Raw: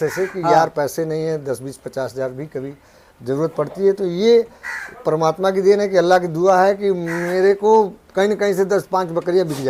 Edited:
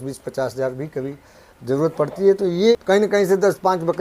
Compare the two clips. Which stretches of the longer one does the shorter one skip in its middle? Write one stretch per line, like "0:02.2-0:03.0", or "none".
0:04.3-0:08.0